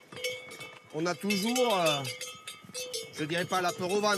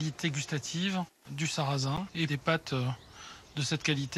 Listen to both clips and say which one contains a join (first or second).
second